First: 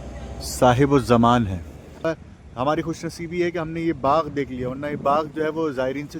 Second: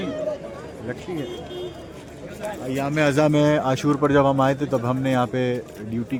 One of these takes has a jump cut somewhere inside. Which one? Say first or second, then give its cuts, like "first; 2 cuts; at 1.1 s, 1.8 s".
first; 1 cut; at 2.0 s